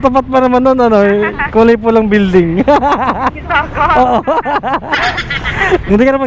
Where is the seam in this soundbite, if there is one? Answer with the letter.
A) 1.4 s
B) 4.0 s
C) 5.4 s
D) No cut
C